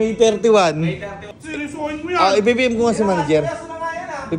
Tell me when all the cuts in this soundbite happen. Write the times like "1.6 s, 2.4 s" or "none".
1.3 s